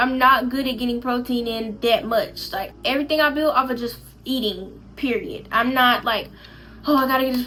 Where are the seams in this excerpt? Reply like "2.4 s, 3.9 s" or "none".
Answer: none

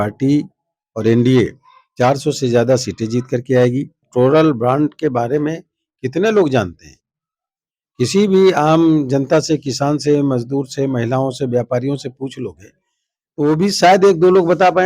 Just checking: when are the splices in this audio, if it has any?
4.1 s

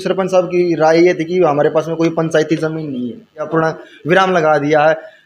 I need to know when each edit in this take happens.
3.5 s

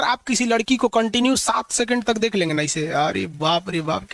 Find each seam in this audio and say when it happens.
none

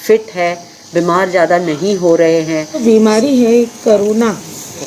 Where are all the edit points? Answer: 2.8 s

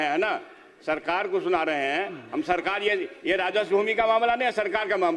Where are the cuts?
none

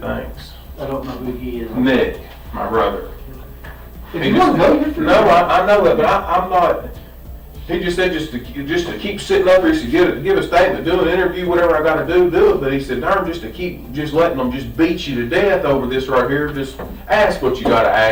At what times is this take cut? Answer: none

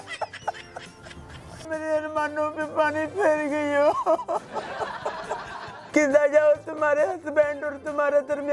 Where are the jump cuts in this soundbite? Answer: 1.7 s, 5.6 s

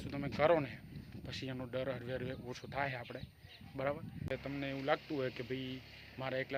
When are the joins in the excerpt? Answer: 4.3 s

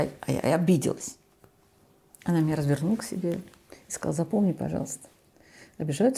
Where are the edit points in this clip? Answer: none

